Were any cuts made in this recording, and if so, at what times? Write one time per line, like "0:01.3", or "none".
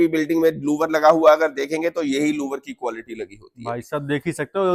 none